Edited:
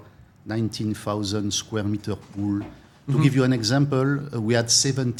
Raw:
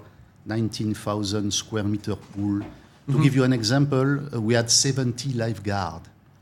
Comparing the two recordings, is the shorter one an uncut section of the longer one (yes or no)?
yes